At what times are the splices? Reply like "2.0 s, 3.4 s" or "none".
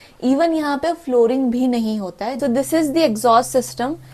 2.3 s